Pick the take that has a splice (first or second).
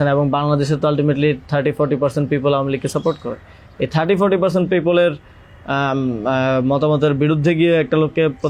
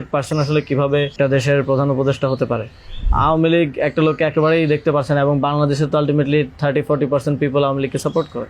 second